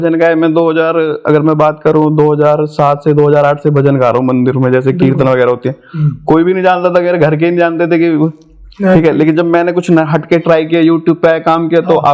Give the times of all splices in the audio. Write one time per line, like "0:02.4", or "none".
none